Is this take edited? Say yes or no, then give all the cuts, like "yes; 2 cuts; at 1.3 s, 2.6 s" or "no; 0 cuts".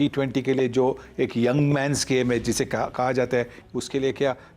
yes; 1 cut; at 3.6 s